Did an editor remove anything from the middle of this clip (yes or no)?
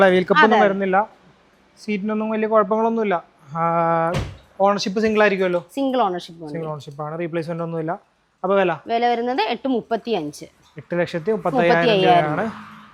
no